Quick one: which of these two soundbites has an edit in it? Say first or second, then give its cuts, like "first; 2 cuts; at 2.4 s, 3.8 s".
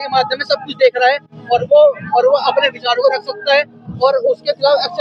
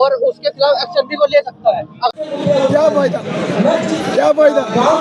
second; 1 cut; at 2.2 s